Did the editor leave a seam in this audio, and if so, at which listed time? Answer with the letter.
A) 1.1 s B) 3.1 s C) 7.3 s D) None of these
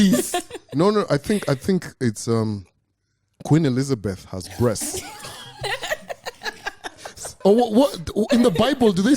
C